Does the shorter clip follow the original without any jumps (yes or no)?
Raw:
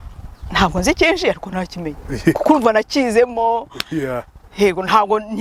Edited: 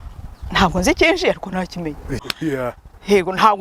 no